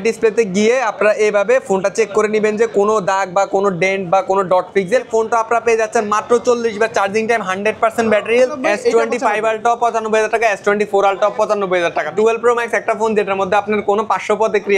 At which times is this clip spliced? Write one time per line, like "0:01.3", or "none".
0:05.1
0:08.6
0:12.1